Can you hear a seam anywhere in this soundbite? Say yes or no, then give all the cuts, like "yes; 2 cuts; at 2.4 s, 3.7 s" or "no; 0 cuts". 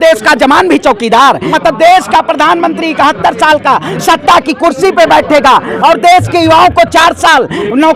yes; 1 cut; at 1.5 s